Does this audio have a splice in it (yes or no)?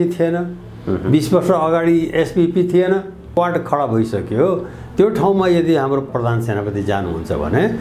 yes